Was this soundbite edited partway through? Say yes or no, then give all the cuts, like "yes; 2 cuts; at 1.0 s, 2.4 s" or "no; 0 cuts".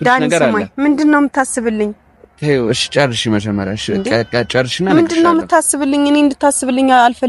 no; 0 cuts